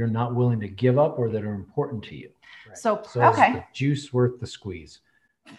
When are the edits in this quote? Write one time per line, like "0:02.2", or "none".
0:03.1